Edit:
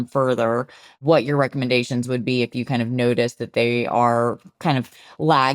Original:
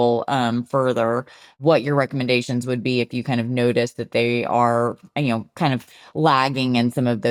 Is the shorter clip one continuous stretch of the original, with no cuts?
no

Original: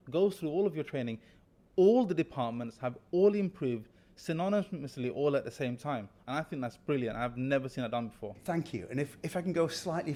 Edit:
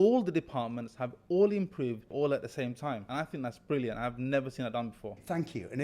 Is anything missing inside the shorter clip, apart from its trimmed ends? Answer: yes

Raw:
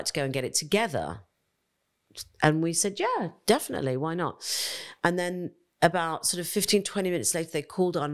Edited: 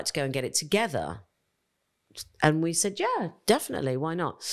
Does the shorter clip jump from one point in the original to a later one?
no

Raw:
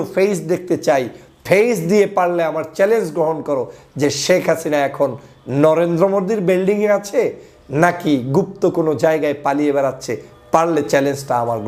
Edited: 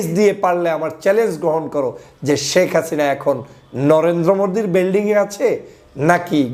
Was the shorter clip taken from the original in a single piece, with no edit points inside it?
yes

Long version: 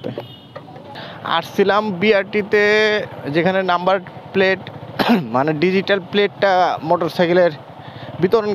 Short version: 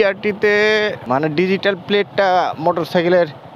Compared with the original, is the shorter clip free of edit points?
no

